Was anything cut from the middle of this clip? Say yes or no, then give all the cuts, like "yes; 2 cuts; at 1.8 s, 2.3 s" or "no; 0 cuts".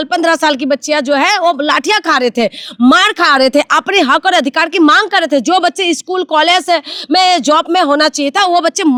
no; 0 cuts